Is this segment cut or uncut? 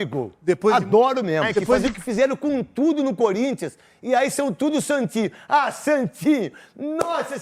cut